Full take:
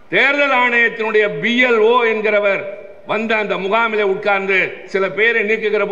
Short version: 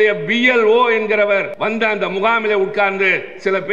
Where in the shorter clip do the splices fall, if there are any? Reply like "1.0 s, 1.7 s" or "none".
1.5 s